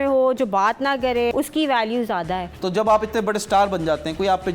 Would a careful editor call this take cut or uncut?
cut